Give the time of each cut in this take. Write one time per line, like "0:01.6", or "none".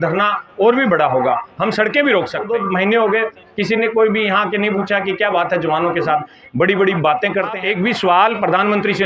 0:02.5
0:07.6